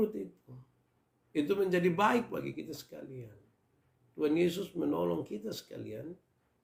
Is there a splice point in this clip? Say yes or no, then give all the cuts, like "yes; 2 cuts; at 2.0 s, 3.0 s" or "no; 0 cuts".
no; 0 cuts